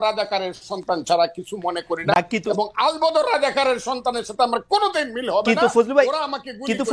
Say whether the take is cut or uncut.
uncut